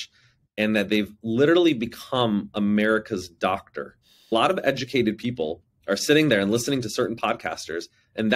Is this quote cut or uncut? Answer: cut